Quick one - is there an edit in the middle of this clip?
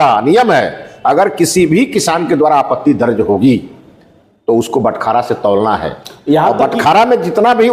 no; 0 cuts

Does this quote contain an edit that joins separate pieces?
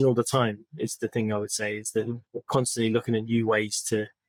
no; 0 cuts

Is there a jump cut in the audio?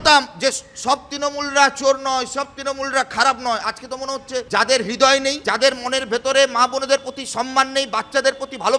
yes; 2 cuts; at 4.5 s, 5.4 s

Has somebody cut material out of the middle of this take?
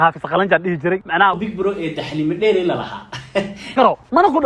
no; 0 cuts

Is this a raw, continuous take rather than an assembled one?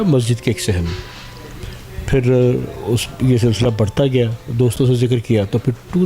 yes; 0 cuts

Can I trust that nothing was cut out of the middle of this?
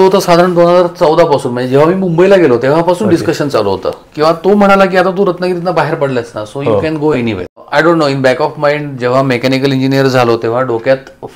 no; 1 cut; at 7.5 s

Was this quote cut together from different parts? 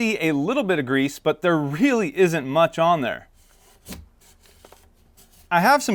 no; 0 cuts

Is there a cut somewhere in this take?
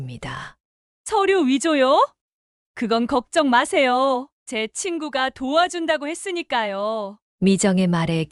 no; 0 cuts

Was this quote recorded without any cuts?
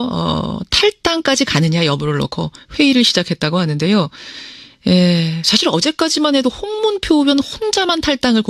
yes; 0 cuts

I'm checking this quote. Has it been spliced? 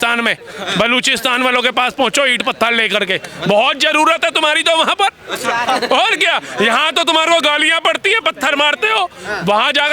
no; 0 cuts

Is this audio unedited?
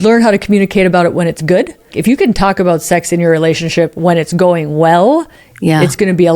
no; 1 cut; at 1.9 s

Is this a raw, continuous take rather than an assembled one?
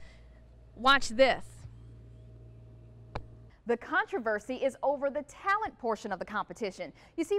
no; 1 cut; at 3.4 s

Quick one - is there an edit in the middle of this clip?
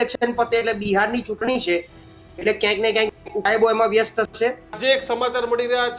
yes; 1 cut; at 4.8 s

